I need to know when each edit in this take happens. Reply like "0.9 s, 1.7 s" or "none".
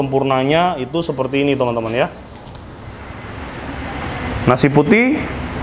none